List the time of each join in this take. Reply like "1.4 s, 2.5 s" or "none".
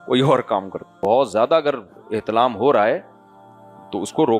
0.9 s